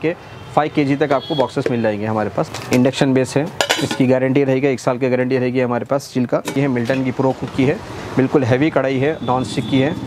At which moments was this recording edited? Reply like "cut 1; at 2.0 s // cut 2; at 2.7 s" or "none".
cut 1; at 2.5 s // cut 2; at 6.5 s

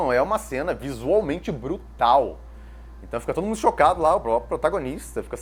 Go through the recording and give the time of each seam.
none

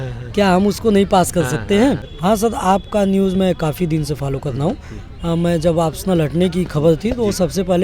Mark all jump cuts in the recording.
cut 1; at 2.1 s

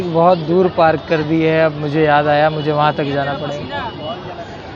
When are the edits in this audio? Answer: none

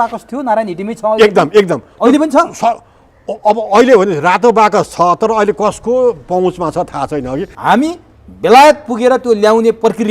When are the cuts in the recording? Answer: cut 1; at 7.5 s

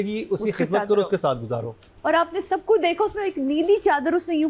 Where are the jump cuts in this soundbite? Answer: cut 1; at 1.8 s

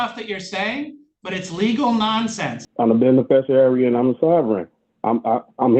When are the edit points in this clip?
cut 1; at 2.6 s

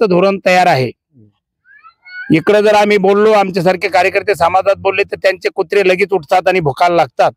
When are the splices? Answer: none

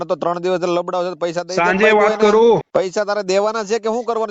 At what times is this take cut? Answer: cut 1; at 2.7 s

